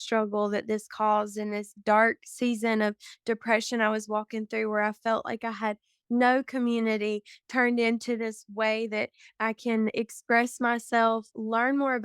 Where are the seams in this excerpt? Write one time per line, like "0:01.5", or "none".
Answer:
0:09.9